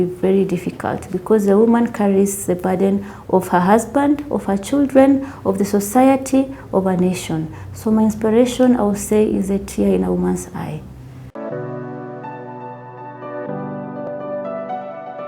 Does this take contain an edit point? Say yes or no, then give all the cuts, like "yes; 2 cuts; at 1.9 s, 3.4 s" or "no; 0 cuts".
no; 0 cuts